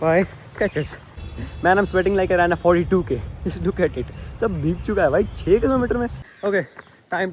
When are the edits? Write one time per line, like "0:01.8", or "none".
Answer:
0:01.0
0:06.2